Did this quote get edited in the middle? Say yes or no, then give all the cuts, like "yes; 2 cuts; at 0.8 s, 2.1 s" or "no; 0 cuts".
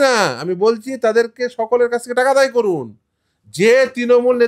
no; 0 cuts